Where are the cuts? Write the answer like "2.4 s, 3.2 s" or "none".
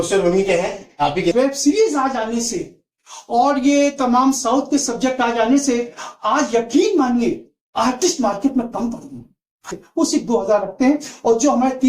1.3 s, 9.8 s